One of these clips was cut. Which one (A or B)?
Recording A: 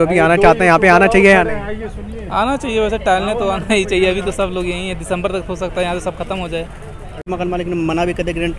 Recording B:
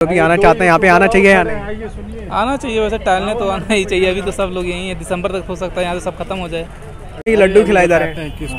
A